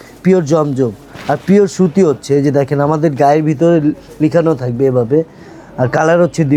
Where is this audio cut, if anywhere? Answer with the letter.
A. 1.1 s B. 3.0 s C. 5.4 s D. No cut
D